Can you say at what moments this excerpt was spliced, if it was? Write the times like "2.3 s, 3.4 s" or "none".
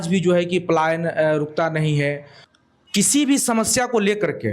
2.3 s